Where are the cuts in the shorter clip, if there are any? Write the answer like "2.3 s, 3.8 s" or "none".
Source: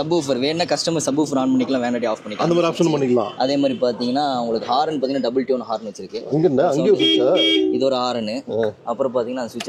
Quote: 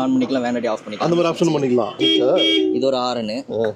2.0 s